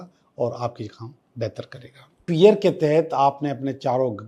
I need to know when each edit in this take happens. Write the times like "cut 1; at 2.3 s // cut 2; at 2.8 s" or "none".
cut 1; at 2.2 s